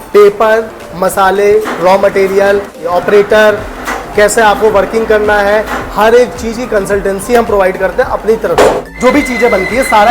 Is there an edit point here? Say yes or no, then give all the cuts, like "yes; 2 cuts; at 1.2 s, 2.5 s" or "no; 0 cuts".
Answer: yes; 2 cuts; at 2.8 s, 8.9 s